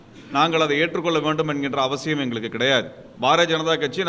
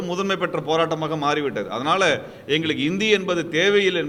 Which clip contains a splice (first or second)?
first